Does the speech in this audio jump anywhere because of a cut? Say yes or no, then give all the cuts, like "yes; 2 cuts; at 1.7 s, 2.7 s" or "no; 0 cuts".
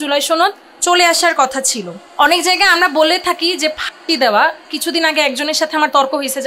yes; 1 cut; at 2.0 s